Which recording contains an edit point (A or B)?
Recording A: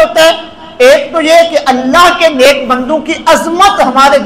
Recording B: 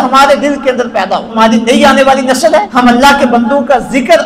B